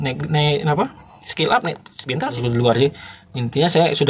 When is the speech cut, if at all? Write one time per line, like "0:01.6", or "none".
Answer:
0:02.4